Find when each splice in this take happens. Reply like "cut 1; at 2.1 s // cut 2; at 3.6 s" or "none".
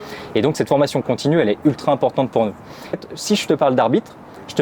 cut 1; at 3.0 s

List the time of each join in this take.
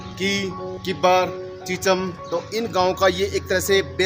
cut 1; at 2.2 s

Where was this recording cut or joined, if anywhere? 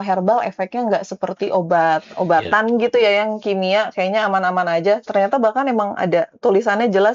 none

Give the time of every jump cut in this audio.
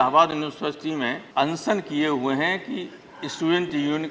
cut 1; at 1.2 s

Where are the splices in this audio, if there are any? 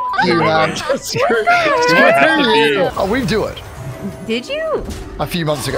cut 1; at 2.9 s

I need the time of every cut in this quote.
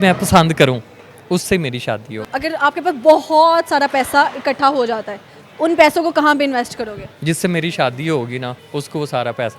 cut 1; at 2.3 s // cut 2; at 7.1 s // cut 3; at 8.6 s

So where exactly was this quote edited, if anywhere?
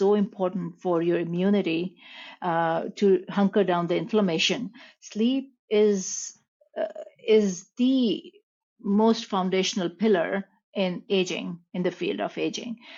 none

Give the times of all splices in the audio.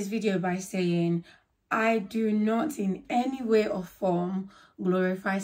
none

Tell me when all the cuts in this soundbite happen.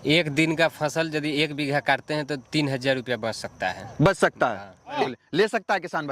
cut 1; at 5.0 s

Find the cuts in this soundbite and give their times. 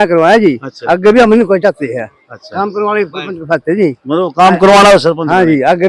none

